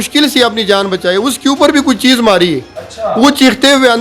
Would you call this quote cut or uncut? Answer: uncut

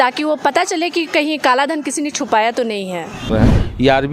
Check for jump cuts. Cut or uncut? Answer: cut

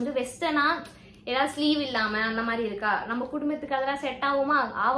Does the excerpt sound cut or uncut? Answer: uncut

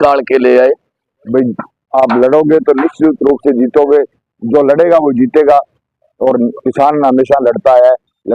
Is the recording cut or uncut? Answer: cut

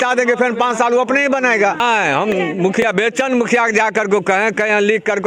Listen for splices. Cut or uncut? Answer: cut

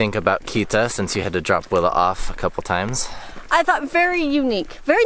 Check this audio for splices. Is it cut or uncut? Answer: uncut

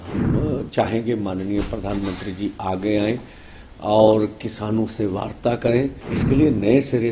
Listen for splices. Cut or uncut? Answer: cut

